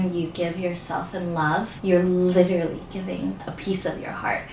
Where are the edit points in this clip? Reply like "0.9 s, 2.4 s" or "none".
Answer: 1.7 s, 3.4 s

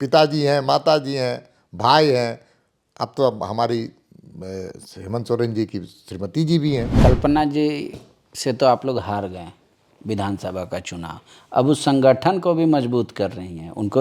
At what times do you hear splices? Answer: 6.9 s

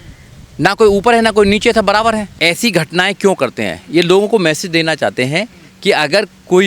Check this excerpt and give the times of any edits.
2.3 s

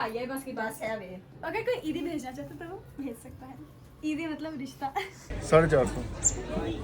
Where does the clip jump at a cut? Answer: 1.3 s, 5.3 s

